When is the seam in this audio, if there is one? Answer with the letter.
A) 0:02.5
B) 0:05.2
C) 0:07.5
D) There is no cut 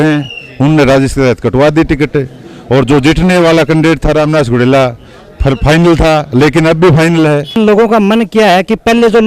C